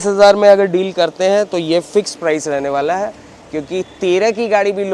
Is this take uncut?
yes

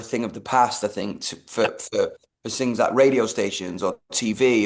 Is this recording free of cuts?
yes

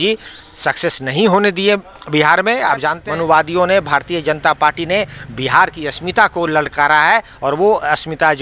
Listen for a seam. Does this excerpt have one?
yes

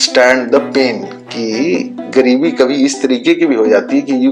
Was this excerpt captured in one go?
yes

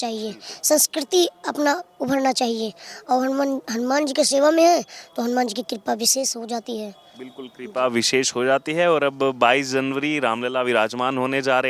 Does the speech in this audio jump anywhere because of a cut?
no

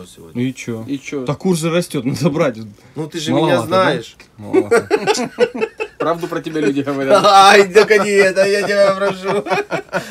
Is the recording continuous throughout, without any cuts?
yes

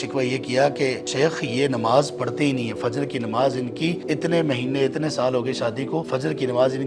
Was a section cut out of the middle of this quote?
yes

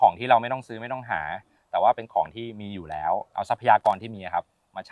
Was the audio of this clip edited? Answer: yes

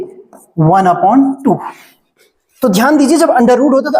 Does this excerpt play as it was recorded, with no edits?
yes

